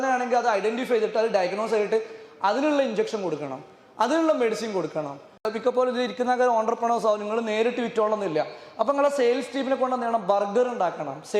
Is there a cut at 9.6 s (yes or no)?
no